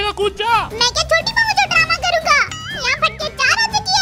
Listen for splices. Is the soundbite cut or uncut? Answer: uncut